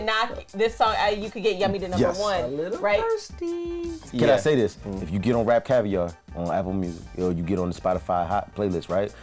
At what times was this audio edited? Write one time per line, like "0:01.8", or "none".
0:04.1